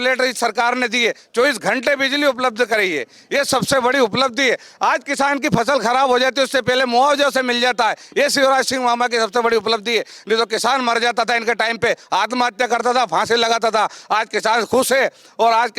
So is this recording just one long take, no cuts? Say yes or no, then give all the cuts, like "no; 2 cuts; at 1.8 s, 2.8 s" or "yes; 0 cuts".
yes; 0 cuts